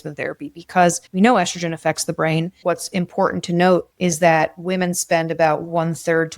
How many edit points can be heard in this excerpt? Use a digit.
3